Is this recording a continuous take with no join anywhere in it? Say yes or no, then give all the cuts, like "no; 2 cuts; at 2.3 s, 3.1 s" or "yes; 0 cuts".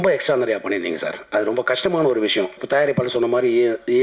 no; 1 cut; at 2.6 s